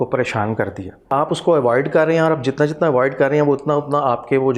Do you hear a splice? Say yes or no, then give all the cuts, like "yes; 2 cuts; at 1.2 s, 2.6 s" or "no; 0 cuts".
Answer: yes; 1 cut; at 1.1 s